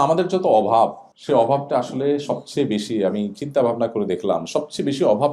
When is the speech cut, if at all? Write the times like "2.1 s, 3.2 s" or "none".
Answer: 1.1 s

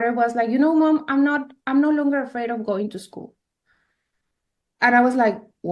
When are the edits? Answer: none

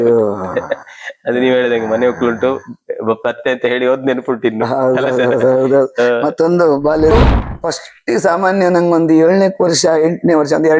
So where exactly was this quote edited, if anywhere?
7.1 s

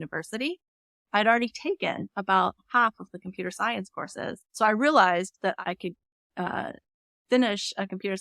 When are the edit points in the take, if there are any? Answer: 4.4 s, 5.6 s

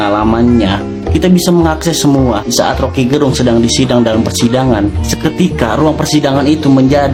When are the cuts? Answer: none

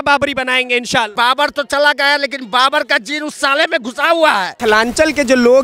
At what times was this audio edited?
1.1 s, 4.5 s

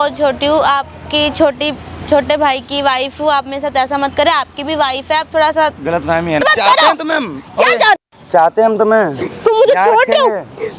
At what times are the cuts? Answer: 6.4 s

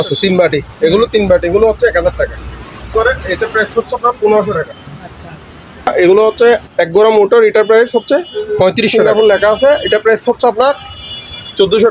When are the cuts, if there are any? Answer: 2.9 s, 5.9 s, 9.0 s

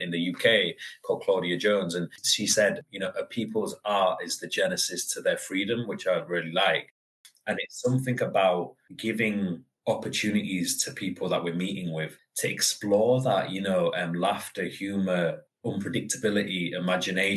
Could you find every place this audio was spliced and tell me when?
2.3 s

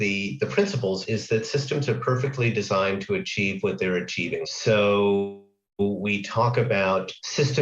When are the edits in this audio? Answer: 1.0 s

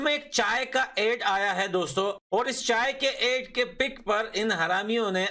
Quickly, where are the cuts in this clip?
2.2 s

